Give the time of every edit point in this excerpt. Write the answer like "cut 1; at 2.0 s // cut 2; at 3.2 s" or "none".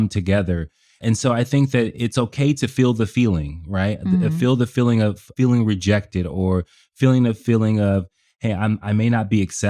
cut 1; at 0.9 s // cut 2; at 5.3 s